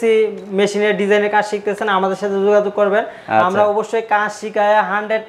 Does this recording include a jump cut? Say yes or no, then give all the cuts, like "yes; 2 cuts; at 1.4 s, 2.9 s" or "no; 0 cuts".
no; 0 cuts